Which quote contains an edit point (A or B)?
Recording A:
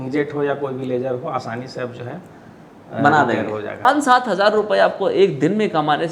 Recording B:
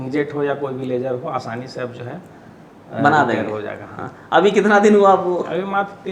A